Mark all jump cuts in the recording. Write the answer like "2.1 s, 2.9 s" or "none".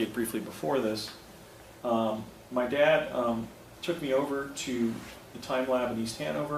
4.9 s